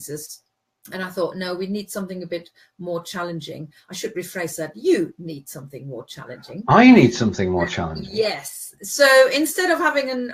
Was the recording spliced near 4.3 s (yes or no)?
no